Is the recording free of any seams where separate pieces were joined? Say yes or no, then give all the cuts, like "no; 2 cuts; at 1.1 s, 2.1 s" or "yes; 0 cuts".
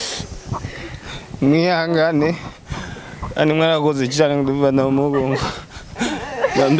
yes; 0 cuts